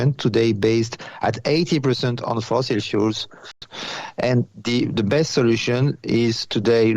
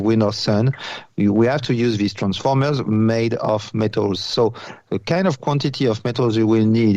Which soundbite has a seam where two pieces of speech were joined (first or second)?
first